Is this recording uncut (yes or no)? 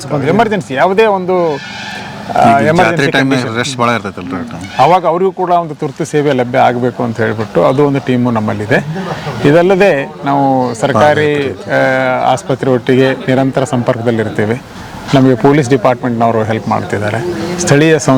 yes